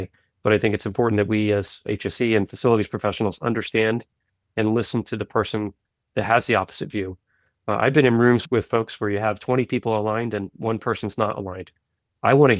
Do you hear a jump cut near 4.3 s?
no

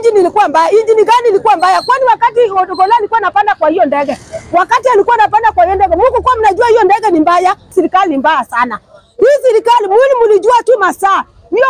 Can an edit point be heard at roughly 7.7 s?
yes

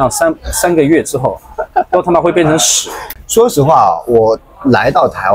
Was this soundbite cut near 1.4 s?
no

